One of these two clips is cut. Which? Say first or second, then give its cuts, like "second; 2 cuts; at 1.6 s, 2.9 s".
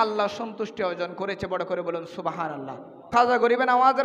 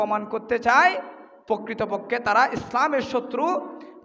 first; 1 cut; at 3.1 s